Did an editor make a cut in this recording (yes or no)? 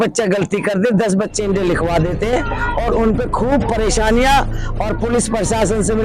no